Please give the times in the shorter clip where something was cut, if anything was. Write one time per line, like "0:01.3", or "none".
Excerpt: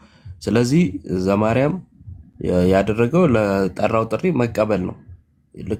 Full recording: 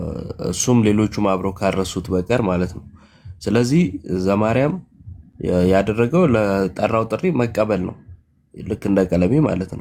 none